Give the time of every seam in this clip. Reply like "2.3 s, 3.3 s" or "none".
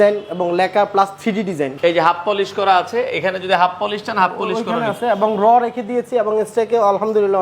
1.7 s